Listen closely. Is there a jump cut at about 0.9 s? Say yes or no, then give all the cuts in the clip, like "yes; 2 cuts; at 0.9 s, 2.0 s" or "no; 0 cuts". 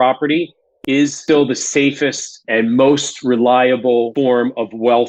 yes; 3 cuts; at 0.9 s, 2.4 s, 4.1 s